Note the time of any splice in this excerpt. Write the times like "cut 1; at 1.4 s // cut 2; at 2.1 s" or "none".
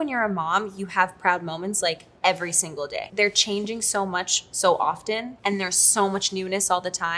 none